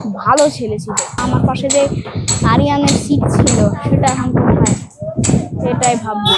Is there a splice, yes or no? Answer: yes